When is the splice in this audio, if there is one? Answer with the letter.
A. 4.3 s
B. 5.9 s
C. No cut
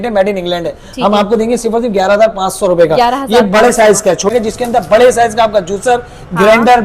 A